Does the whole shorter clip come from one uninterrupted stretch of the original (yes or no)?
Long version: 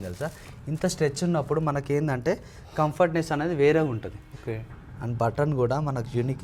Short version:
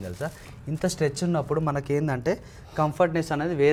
yes